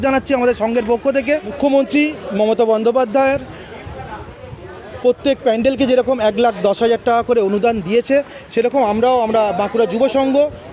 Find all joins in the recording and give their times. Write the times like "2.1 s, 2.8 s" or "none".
1.5 s